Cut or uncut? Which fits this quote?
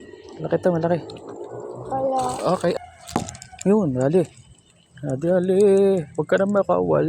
cut